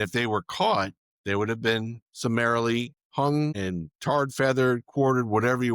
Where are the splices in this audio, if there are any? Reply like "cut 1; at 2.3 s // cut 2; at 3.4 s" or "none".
cut 1; at 1.1 s // cut 2; at 2.0 s // cut 3; at 3.0 s // cut 4; at 3.5 s